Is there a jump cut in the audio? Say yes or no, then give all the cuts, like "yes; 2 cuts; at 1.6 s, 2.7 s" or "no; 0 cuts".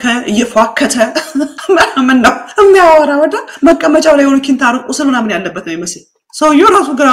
no; 0 cuts